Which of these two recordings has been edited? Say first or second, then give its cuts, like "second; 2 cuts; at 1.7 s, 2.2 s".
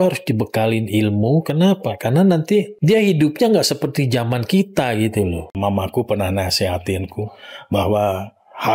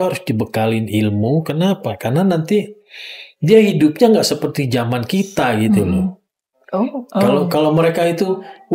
first; 2 cuts; at 2.7 s, 5.3 s